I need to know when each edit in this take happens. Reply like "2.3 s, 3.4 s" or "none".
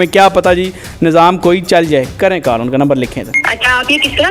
3.4 s